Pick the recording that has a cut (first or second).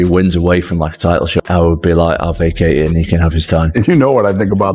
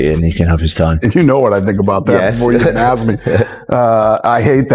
first